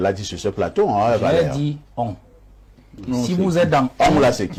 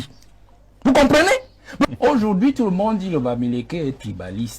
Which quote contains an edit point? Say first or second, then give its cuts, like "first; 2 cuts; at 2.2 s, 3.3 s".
second; 1 cut; at 1.9 s